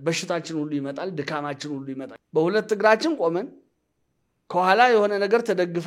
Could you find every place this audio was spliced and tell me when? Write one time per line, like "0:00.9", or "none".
0:02.1